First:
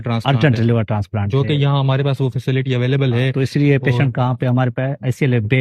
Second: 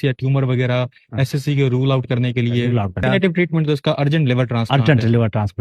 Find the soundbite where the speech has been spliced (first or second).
second